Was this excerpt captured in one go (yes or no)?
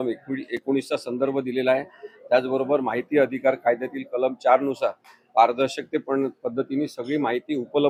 yes